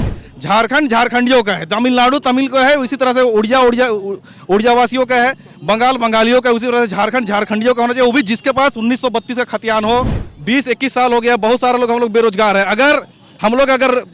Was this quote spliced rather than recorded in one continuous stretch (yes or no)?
yes